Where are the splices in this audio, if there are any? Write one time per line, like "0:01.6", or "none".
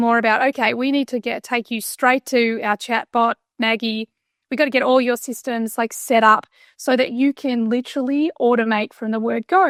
none